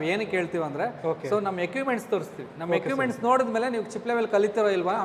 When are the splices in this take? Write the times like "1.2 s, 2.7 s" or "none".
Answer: none